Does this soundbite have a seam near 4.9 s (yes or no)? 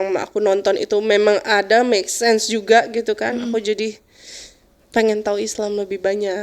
no